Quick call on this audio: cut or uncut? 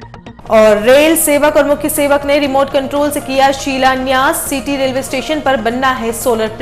uncut